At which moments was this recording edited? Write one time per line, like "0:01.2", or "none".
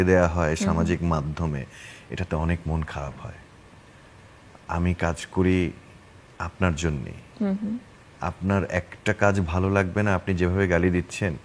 none

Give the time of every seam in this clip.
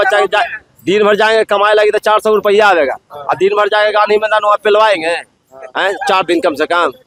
none

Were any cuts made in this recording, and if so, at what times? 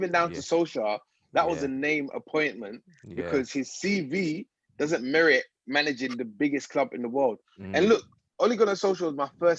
none

